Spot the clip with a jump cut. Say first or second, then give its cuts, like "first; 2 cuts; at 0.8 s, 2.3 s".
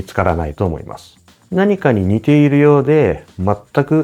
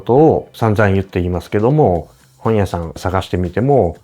second; 1 cut; at 3.0 s